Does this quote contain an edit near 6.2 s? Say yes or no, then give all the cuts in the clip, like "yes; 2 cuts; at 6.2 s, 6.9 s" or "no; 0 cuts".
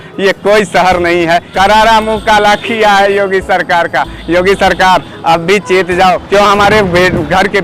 yes; 2 cuts; at 1.5 s, 6.2 s